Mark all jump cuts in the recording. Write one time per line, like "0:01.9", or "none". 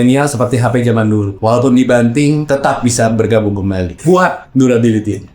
0:01.3
0:02.4
0:03.9